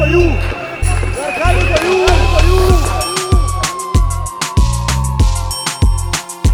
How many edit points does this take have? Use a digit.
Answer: 0